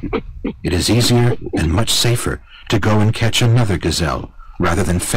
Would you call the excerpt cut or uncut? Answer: uncut